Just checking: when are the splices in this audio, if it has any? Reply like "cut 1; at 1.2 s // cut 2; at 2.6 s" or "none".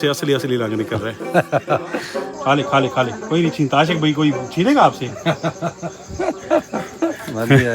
cut 1; at 2.3 s